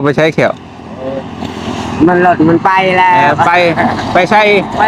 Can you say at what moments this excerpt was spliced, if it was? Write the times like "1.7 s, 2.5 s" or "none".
none

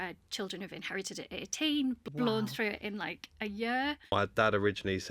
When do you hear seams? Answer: 2.0 s, 4.1 s

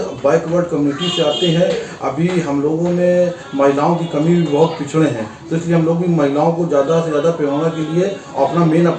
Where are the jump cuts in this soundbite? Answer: none

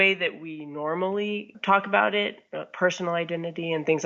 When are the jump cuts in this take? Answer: 1.5 s

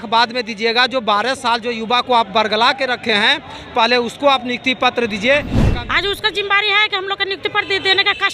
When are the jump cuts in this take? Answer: 5.6 s

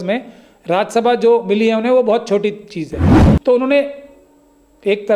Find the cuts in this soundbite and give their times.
3.1 s

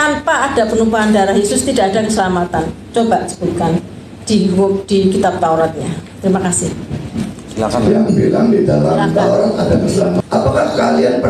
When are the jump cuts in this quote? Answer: 10.2 s

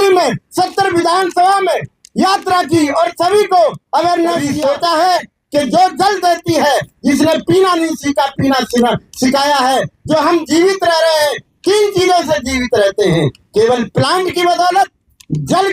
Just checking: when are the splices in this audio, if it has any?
4.5 s

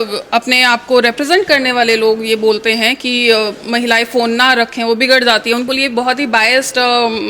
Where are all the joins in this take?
5.7 s

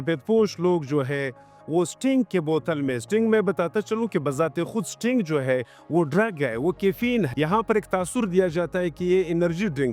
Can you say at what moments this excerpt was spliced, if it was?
none

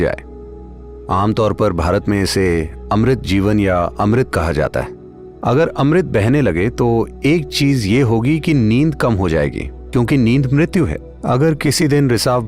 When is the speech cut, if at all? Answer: none

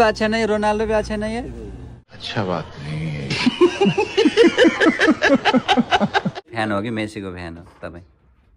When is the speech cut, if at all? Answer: 6.5 s

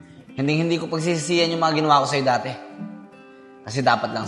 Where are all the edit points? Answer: none

